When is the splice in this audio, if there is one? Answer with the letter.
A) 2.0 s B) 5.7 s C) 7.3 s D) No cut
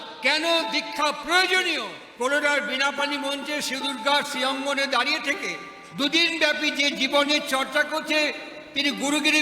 A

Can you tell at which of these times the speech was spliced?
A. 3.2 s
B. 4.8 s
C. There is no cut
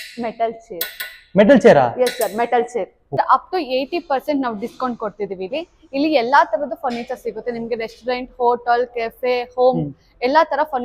A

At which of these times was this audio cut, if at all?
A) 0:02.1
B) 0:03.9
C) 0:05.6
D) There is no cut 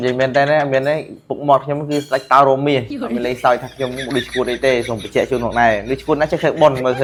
D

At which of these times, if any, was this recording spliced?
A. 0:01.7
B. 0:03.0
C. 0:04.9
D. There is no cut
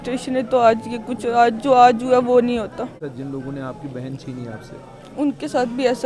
B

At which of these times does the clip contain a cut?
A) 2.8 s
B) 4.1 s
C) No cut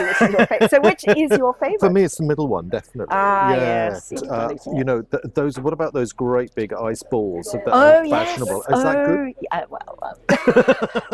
B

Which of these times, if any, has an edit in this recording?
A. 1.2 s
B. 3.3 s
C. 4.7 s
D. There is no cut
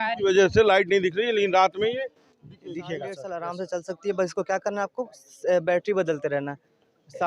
B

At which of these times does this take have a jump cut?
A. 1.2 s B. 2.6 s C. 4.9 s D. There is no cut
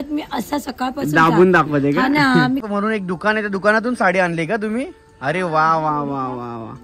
B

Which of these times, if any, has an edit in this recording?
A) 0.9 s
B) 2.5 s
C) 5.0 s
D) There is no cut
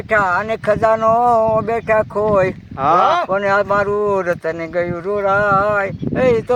D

